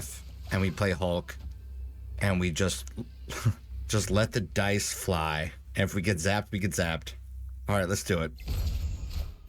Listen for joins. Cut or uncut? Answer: cut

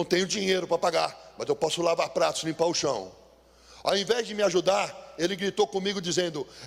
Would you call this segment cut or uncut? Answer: uncut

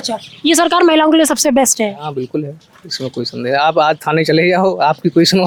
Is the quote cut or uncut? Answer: uncut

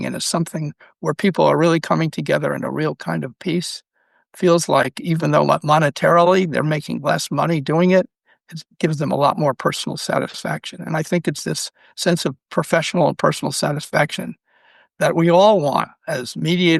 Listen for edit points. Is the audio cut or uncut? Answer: uncut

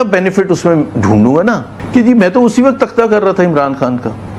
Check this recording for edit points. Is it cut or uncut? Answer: cut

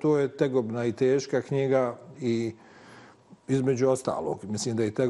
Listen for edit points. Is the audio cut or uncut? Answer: uncut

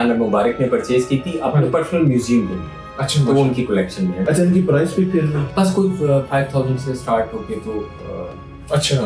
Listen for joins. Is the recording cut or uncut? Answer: cut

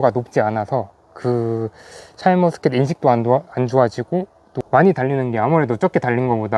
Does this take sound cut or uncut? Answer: cut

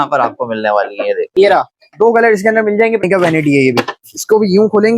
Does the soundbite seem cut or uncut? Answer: cut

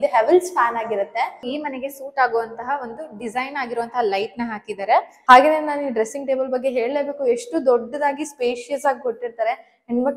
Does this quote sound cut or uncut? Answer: cut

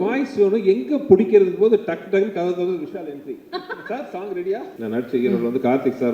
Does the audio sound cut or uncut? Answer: cut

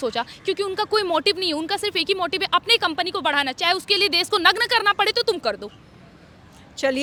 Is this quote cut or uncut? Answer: uncut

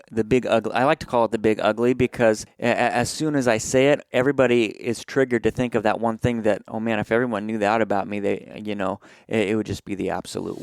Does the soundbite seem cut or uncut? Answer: cut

